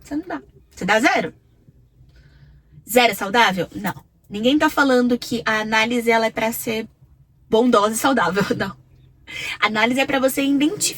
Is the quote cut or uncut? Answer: uncut